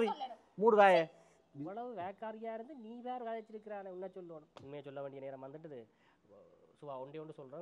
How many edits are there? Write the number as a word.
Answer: one